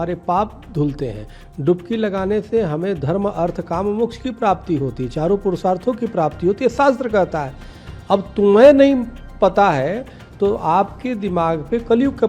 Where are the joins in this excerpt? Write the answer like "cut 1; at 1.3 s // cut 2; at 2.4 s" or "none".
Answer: none